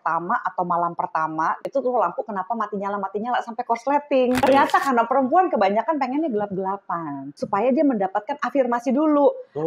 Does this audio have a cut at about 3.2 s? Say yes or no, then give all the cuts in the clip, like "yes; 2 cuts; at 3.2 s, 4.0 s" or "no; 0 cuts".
no; 3 cuts; at 1.6 s, 4.4 s, 7.3 s